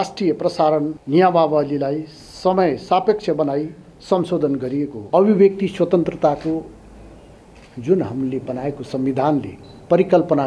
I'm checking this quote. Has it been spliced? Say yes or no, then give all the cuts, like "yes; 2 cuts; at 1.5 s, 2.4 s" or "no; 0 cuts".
yes; 2 cuts; at 1.0 s, 5.0 s